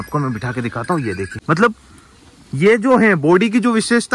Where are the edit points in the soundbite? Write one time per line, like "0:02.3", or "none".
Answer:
0:01.3